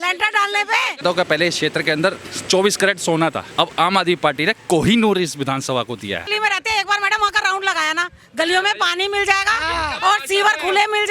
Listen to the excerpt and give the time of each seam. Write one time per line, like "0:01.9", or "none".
0:01.0
0:03.4
0:06.3